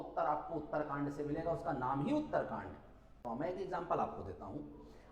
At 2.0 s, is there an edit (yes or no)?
no